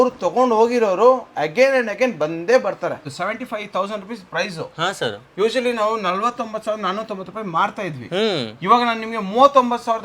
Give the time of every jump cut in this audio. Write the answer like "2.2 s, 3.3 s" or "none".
3.1 s